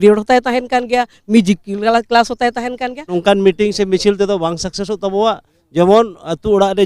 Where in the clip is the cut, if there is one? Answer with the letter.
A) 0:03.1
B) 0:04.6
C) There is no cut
A